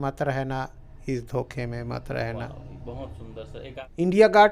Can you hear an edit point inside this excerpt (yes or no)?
yes